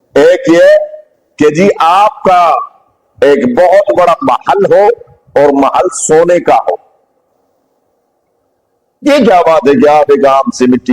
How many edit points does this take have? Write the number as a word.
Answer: zero